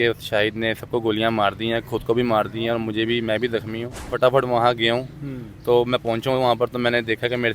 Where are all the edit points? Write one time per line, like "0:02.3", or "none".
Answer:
0:04.1